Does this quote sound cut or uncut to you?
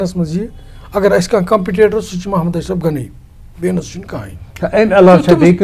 uncut